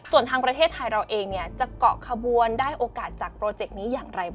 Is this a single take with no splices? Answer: yes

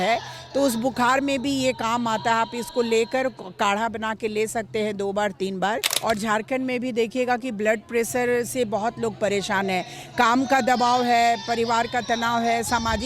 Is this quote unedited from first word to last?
no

